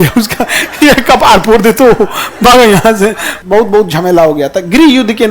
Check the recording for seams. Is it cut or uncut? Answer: cut